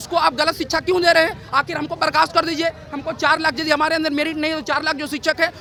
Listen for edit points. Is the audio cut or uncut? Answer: uncut